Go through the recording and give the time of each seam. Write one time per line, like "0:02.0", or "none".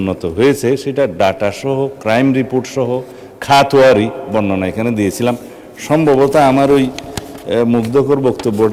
none